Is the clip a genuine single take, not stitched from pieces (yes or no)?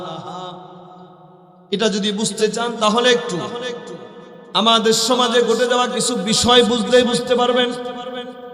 yes